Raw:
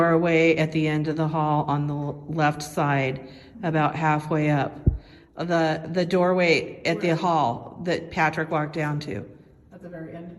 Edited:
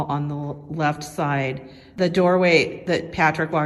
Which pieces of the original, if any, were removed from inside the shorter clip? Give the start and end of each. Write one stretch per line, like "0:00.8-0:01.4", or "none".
0:03.5-0:05.9
0:06.7-0:07.7